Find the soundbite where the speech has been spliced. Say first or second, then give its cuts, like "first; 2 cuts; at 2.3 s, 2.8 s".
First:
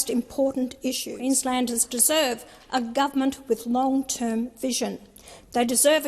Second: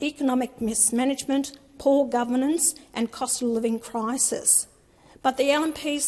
first; 1 cut; at 1.1 s